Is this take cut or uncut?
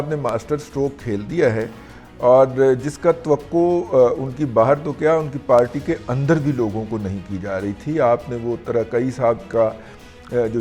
uncut